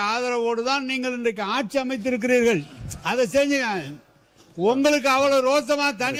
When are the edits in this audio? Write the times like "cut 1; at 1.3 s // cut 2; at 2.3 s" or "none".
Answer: none